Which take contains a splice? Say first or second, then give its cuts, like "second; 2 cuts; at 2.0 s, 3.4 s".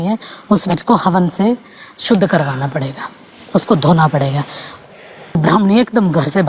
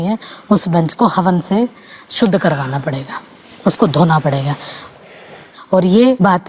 first; 2 cuts; at 0.7 s, 5.4 s